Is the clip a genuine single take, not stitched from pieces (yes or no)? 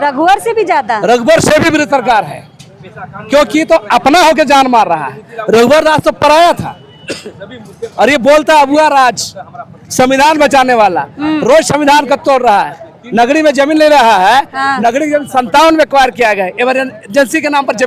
yes